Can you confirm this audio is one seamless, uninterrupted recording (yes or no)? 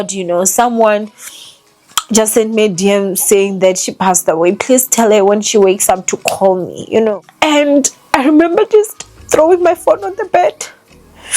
no